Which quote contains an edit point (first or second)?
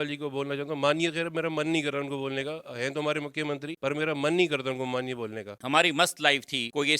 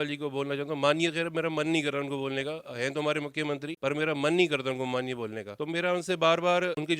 first